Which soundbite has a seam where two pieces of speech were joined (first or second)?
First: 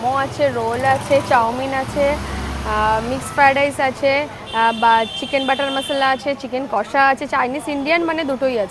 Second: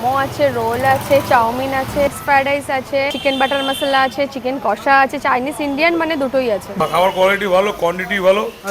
second